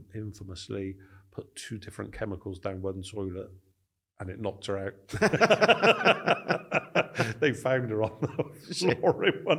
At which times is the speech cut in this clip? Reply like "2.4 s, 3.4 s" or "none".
none